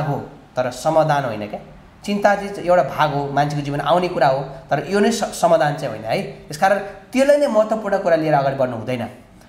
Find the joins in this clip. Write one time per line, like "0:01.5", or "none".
none